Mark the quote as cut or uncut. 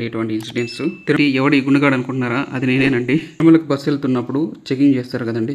cut